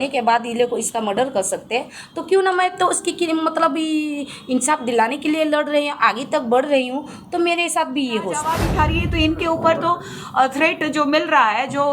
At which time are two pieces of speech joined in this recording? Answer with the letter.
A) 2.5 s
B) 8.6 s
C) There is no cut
B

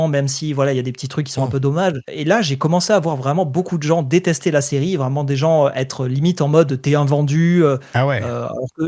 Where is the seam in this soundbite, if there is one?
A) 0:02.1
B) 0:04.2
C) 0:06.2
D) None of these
A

